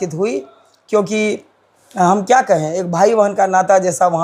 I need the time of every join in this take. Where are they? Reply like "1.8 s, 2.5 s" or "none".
none